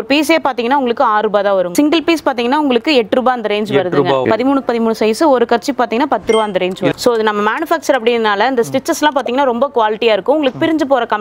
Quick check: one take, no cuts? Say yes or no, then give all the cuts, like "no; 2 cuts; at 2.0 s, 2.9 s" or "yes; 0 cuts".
no; 3 cuts; at 1.7 s, 4.2 s, 6.9 s